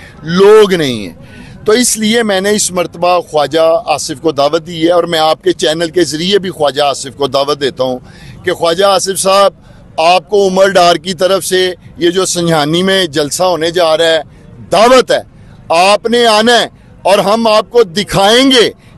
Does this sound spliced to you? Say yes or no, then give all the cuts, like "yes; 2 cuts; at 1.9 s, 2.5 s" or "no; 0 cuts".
no; 0 cuts